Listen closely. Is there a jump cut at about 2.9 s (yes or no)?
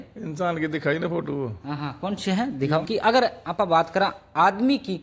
yes